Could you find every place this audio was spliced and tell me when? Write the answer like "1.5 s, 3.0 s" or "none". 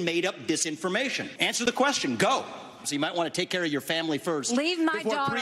1.3 s, 2.9 s

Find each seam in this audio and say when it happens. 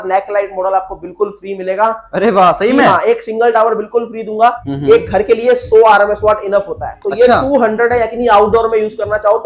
4.7 s

